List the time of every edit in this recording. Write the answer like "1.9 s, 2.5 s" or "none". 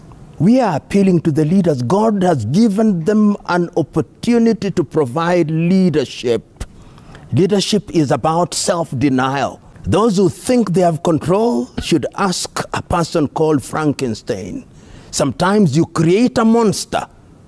9.7 s

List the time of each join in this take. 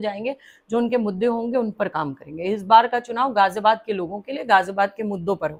none

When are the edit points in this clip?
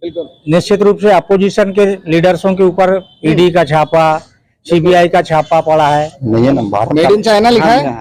6.2 s

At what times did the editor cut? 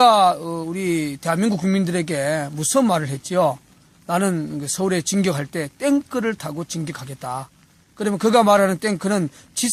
none

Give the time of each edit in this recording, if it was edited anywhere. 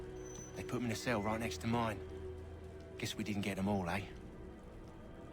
none

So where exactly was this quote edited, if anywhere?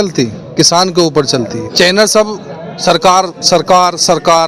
1.7 s

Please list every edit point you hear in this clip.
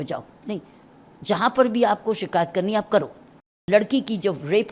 3.5 s

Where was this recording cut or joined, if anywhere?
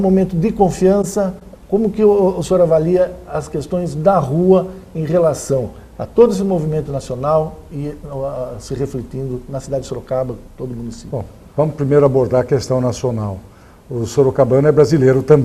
5.1 s

